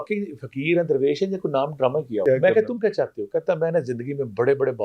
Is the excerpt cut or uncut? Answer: cut